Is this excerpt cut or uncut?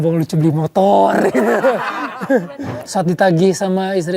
cut